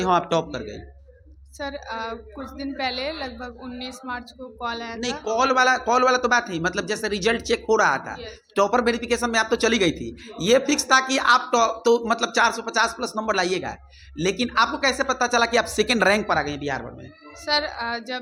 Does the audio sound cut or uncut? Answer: uncut